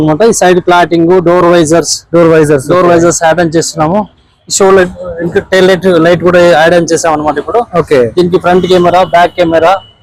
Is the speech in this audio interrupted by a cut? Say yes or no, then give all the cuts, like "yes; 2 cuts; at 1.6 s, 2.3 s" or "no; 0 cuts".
no; 0 cuts